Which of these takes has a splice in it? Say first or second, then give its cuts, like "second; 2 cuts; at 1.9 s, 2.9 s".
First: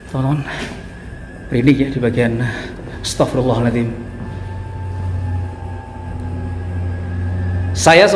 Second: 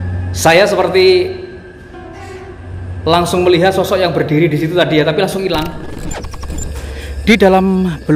second; 1 cut; at 6.1 s